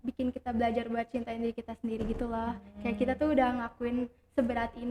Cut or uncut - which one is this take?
uncut